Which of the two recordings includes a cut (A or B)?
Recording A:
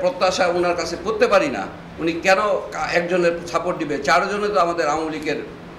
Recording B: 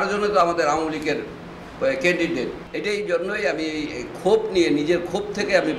B